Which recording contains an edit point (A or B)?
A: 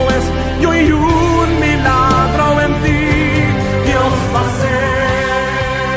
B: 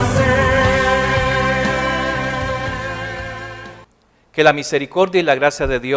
B